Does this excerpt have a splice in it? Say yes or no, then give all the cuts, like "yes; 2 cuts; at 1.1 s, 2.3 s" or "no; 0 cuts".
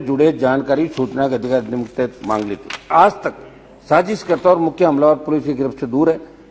yes; 1 cut; at 2.9 s